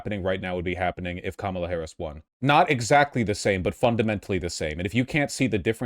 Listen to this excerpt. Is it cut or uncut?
cut